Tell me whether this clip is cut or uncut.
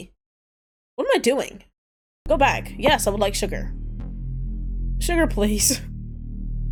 uncut